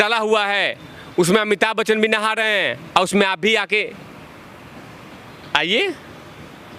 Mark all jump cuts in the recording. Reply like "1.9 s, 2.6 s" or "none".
none